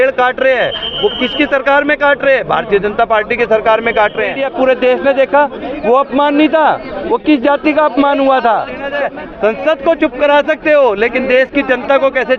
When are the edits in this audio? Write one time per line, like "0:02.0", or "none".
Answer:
0:04.4
0:09.0